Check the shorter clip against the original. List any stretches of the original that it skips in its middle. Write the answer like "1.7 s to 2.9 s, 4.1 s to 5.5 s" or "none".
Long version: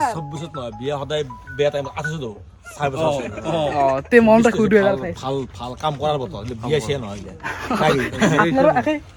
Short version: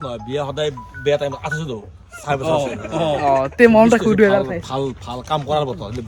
none